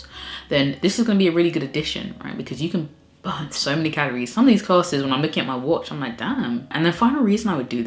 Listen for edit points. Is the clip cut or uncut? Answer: uncut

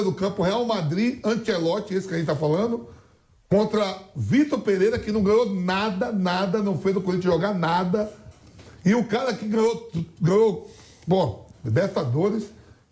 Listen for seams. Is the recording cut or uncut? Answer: uncut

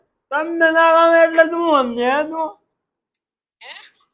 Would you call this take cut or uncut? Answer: cut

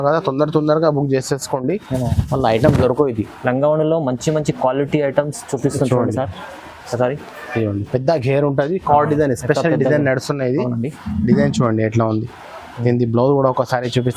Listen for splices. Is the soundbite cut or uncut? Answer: uncut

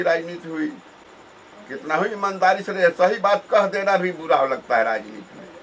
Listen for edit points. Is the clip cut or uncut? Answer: uncut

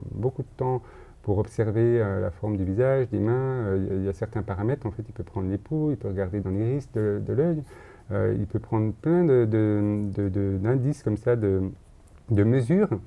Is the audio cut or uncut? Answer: uncut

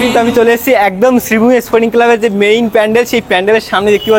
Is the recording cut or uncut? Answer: uncut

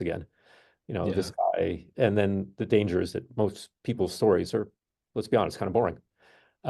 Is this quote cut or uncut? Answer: uncut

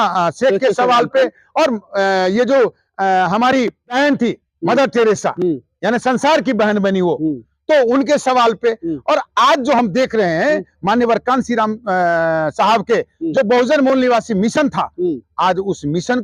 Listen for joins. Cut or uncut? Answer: cut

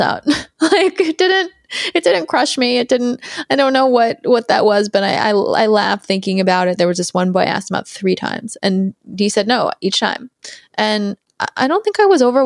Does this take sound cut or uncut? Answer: uncut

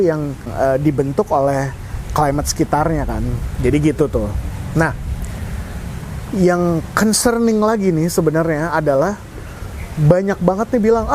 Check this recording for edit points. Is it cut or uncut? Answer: uncut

